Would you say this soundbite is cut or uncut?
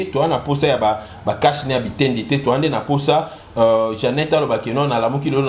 uncut